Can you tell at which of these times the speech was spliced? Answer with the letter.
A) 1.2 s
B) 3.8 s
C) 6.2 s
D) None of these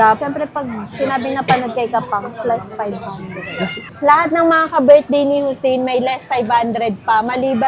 B